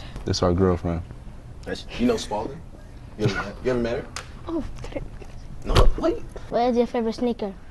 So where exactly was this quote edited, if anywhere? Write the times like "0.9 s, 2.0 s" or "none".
4.2 s